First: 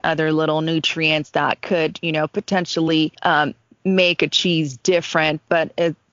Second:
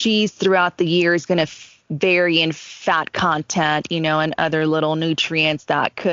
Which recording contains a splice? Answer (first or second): first